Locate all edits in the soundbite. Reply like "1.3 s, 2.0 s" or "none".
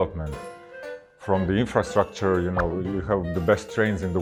none